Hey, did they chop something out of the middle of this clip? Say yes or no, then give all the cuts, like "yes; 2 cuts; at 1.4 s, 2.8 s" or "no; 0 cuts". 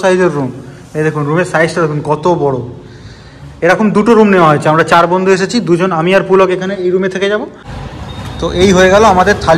yes; 1 cut; at 7.6 s